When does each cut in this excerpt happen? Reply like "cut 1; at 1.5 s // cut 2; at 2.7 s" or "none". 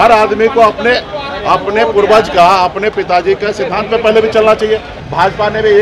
cut 1; at 4.9 s